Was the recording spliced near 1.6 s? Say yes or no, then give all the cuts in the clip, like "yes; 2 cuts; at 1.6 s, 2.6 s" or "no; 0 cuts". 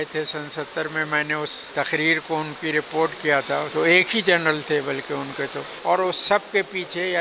yes; 3 cuts; at 1.6 s, 3.7 s, 5.7 s